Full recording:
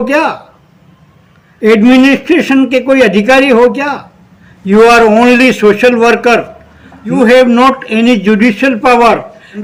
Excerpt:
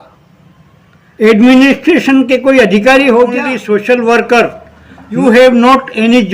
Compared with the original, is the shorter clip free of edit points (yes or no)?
no